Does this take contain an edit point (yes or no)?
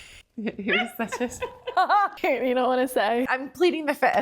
yes